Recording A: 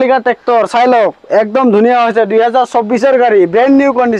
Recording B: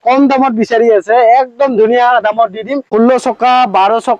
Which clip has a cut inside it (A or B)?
B